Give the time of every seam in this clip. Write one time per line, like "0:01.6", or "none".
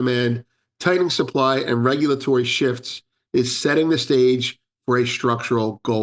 none